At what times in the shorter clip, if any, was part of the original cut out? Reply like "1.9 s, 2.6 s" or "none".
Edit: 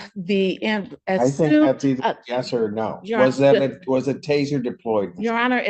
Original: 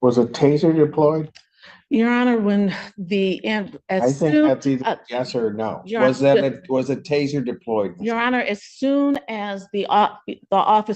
none